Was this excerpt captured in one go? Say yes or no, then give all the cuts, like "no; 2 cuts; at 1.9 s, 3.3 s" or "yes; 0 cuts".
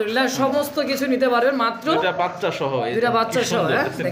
yes; 0 cuts